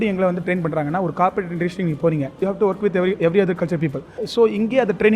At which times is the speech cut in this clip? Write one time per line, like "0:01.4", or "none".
0:02.4
0:04.2